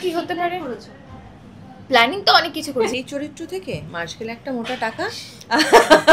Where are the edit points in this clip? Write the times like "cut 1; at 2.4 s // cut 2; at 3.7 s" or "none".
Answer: cut 1; at 2.9 s